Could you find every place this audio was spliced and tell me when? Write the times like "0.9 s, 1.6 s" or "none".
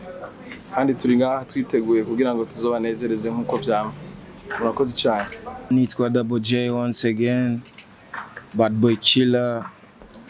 5.7 s